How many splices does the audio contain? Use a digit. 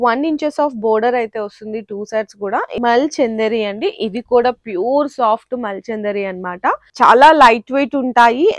2